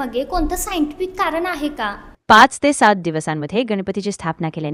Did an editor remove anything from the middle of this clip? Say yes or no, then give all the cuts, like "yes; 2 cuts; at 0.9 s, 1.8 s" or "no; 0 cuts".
no; 0 cuts